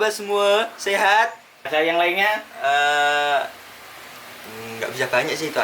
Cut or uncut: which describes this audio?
cut